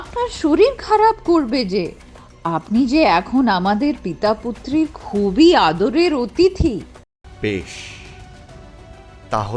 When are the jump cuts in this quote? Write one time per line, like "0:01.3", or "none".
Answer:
0:06.9